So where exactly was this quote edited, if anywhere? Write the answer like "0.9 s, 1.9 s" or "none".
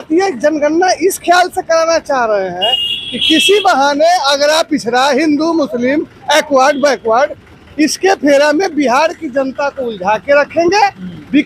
none